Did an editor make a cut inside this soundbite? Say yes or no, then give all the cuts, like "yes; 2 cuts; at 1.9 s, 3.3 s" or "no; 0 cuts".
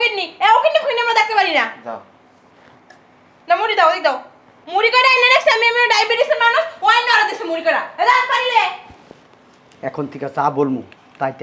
no; 0 cuts